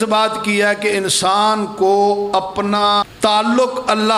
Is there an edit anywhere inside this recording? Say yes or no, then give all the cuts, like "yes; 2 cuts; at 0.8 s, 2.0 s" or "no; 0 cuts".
yes; 1 cut; at 3.0 s